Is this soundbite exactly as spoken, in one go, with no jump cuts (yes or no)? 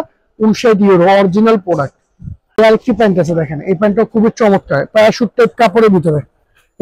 no